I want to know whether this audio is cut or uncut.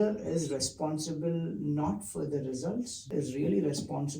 cut